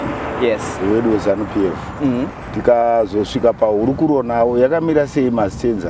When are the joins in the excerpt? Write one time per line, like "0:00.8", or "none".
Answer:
0:02.4